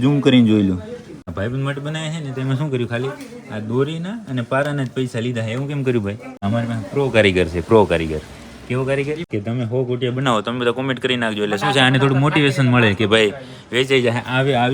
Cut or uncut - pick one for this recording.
cut